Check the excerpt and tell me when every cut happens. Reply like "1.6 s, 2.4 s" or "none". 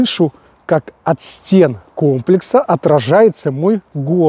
none